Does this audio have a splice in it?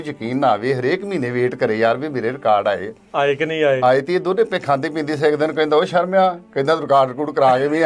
no; 0 cuts

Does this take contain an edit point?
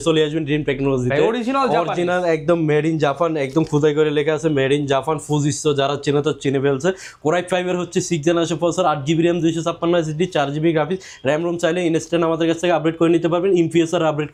no; 0 cuts

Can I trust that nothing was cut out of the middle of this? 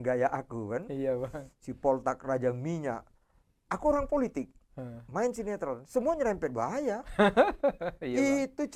yes; 0 cuts

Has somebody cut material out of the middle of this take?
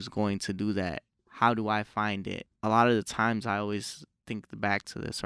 yes; 1 cut; at 2.4 s

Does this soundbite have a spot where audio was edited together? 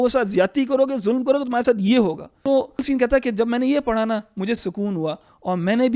yes; 1 cut; at 2.8 s

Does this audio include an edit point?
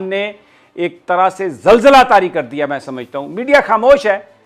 no; 0 cuts

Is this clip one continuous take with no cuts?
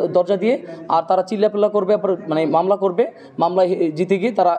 yes; 0 cuts

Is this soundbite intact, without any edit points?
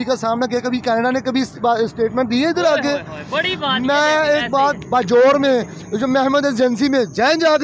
yes; 0 cuts

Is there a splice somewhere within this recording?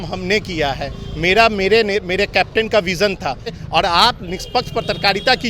yes; 1 cut; at 3.6 s

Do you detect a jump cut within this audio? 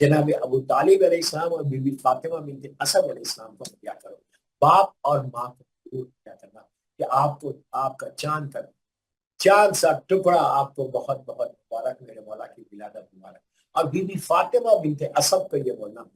no; 0 cuts

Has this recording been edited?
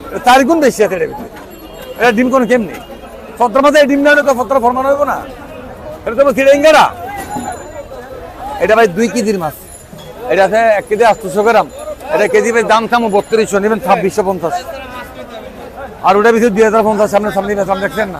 yes; 1 cut; at 8.6 s

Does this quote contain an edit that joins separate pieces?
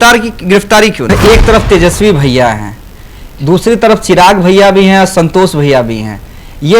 yes; 1 cut; at 1.1 s

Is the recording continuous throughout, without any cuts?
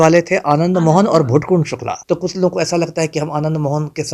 no; 1 cut; at 1.9 s

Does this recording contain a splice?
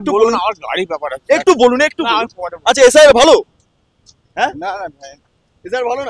no; 0 cuts

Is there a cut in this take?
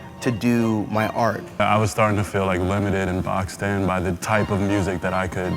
yes; 1 cut; at 1.6 s

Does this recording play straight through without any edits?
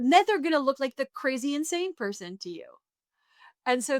yes; 0 cuts

